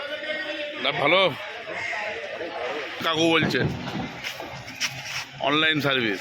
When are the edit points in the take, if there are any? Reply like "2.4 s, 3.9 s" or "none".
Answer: 3.0 s